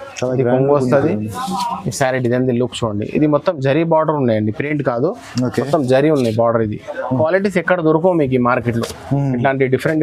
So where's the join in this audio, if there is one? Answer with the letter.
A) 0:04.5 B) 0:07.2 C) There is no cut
B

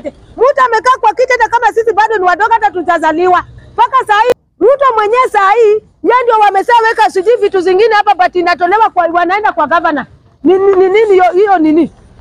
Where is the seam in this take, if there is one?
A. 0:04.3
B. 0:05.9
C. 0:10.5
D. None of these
A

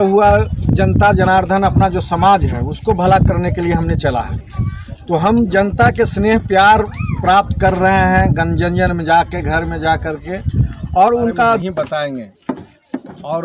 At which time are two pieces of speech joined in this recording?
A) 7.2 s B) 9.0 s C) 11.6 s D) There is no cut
C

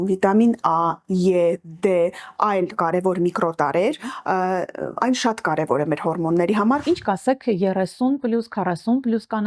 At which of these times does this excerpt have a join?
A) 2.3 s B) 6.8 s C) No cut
B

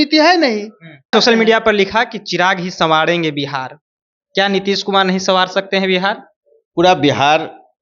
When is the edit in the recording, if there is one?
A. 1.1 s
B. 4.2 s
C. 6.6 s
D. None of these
A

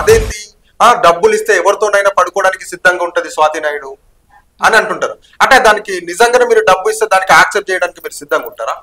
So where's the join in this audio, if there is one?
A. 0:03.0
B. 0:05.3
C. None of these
C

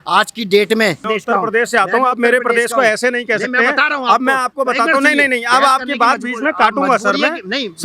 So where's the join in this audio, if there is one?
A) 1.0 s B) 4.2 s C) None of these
A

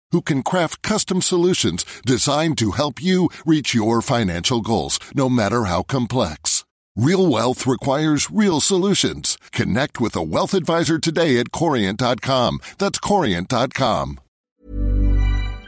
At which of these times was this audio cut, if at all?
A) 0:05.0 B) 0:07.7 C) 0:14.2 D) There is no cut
C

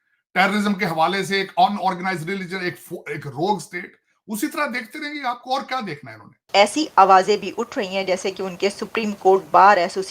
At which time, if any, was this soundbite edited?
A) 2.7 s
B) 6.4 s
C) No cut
B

